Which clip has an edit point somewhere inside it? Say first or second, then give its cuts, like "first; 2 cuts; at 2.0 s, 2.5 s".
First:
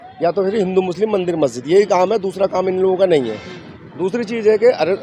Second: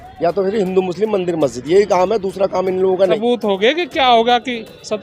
second; 1 cut; at 3.2 s